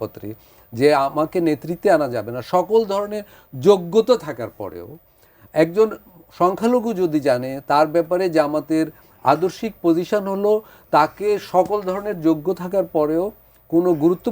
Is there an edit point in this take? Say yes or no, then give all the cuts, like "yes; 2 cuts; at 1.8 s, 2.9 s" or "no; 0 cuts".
no; 0 cuts